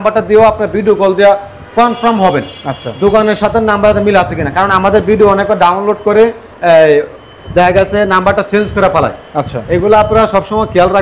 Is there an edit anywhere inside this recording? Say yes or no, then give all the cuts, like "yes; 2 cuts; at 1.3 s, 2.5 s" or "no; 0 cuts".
no; 0 cuts